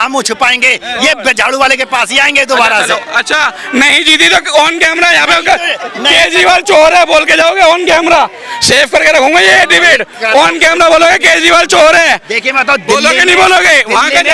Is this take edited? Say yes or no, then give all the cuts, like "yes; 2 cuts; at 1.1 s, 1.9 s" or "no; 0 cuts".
no; 0 cuts